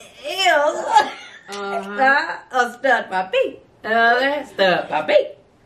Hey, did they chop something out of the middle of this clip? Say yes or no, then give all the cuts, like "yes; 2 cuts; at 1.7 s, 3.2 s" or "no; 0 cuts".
no; 0 cuts